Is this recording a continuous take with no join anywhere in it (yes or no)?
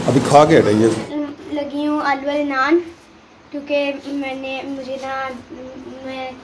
no